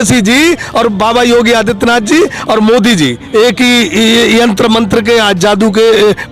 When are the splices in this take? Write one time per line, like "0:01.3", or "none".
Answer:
none